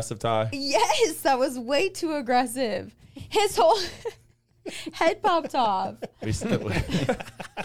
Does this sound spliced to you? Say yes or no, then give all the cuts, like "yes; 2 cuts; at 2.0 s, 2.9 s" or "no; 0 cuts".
no; 0 cuts